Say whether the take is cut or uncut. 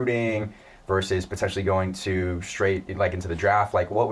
uncut